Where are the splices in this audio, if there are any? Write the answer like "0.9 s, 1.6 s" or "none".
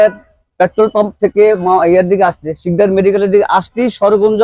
none